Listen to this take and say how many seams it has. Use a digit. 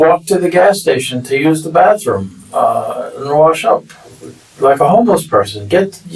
0